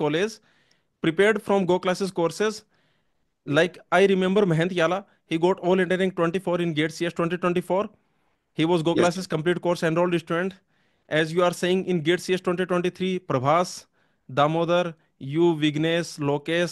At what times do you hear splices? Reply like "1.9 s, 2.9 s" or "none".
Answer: none